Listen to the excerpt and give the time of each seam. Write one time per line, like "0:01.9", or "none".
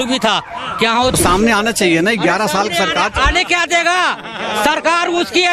0:01.2